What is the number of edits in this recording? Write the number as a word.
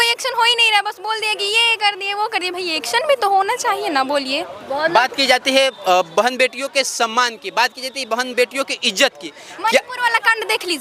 zero